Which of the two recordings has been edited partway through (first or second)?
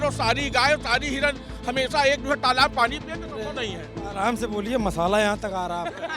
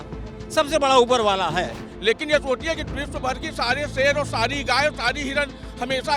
second